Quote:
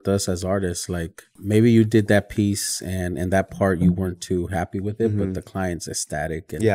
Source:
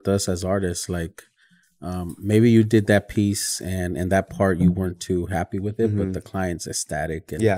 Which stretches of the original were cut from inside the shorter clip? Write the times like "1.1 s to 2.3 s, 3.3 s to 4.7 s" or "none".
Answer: 1.3 s to 2.1 s